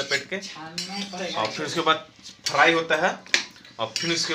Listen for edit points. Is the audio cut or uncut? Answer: uncut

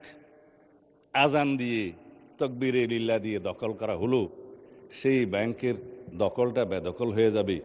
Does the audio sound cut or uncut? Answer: uncut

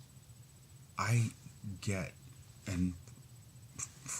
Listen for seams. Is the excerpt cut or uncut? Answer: cut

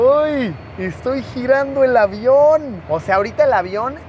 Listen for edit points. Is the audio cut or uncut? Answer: cut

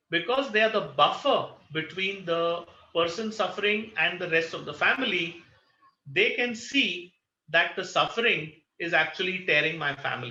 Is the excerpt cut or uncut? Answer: uncut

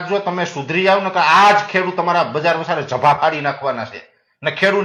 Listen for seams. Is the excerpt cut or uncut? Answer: uncut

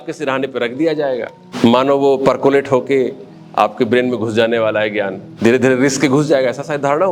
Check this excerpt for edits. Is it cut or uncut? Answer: cut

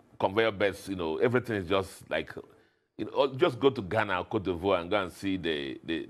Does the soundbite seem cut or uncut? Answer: uncut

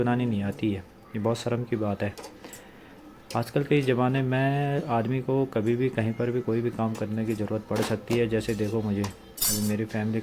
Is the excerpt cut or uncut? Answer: cut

